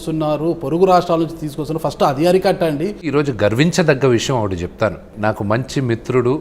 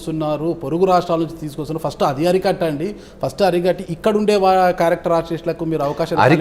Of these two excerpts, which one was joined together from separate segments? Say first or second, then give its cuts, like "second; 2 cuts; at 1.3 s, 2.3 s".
first; 2 cuts; at 3.1 s, 5.1 s